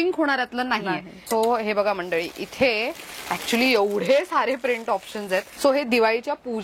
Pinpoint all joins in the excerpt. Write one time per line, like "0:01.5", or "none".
0:01.2
0:05.5

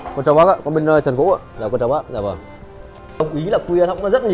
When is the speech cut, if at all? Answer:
0:03.2

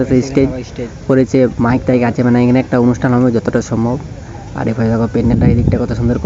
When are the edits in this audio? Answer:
none

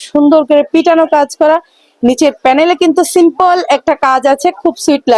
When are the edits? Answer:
none

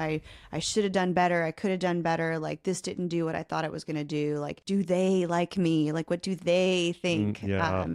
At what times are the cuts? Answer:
0:04.6

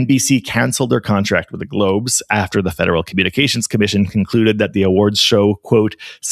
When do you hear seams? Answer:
none

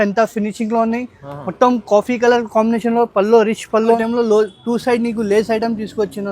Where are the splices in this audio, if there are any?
0:04.0

